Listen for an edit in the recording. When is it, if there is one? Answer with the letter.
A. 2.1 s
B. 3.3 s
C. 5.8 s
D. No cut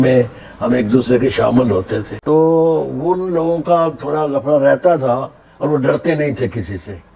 A